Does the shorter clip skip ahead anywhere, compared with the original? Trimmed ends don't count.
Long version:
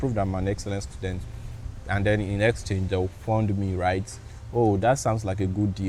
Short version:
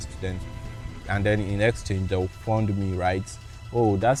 no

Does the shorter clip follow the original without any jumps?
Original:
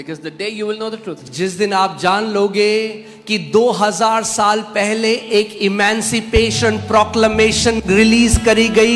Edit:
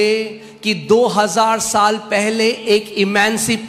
yes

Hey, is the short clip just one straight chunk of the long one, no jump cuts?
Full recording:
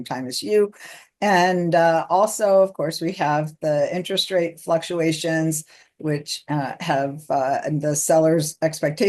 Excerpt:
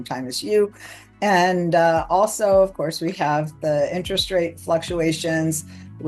yes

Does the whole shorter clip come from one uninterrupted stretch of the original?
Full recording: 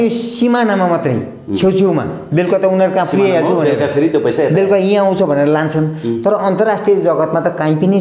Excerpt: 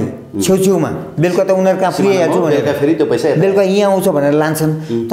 yes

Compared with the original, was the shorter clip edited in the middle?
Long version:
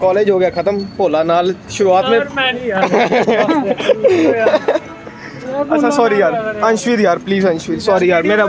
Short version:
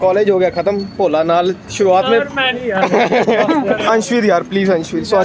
yes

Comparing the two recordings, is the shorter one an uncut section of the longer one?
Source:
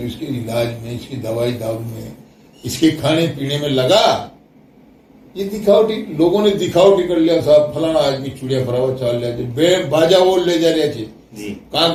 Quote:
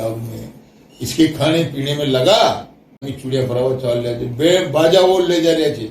no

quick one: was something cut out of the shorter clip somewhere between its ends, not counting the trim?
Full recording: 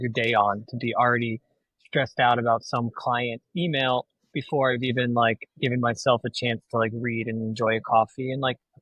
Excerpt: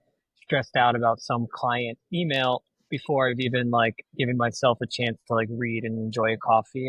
no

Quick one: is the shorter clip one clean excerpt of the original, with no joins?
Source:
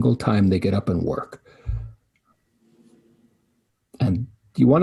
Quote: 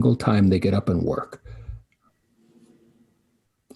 no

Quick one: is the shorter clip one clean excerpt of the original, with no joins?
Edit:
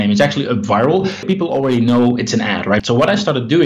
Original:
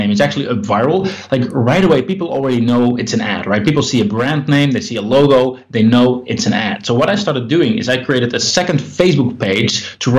no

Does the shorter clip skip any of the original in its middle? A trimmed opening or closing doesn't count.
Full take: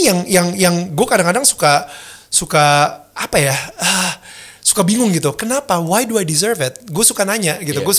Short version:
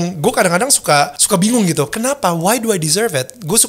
yes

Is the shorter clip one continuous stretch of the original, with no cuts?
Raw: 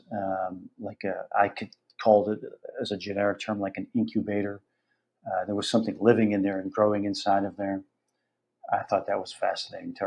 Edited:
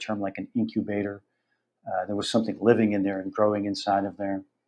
yes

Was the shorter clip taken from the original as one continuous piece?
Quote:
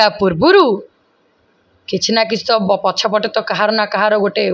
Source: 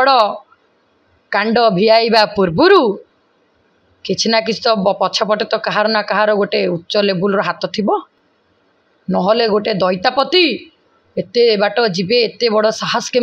yes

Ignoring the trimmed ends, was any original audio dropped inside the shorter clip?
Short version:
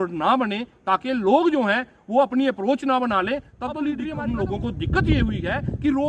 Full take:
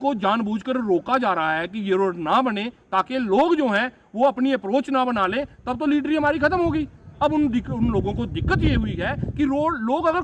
yes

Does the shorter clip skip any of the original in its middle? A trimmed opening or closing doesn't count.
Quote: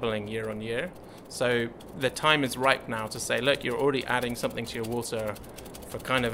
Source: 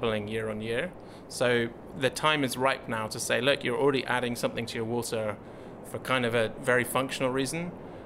no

